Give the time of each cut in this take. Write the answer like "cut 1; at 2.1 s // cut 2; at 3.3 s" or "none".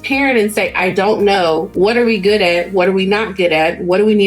cut 1; at 1.7 s